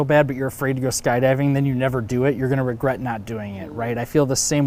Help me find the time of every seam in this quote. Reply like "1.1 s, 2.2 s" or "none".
none